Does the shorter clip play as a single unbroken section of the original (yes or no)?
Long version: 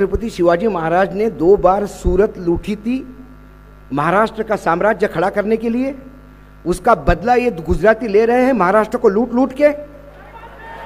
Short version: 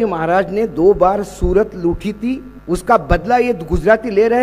no